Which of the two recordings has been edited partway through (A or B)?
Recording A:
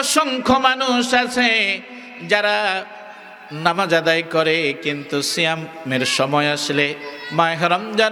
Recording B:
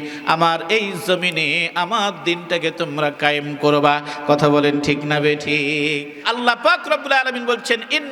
B